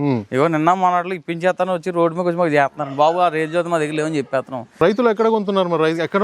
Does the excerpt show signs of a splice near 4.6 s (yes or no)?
yes